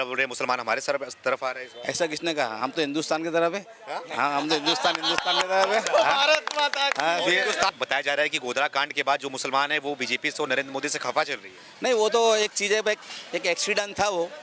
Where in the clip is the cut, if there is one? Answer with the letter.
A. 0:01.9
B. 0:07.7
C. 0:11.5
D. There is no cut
B